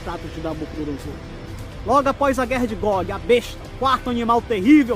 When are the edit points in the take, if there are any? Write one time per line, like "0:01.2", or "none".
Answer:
0:01.3